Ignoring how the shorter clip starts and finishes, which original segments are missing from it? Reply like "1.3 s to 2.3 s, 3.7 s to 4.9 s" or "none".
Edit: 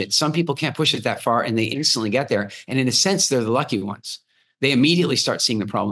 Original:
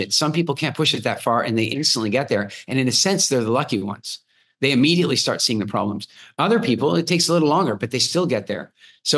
none